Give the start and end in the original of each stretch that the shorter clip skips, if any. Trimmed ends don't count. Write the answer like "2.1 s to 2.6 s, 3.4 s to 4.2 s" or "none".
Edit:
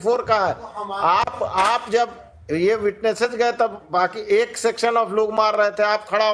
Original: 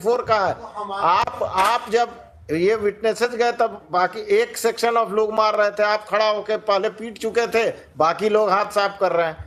none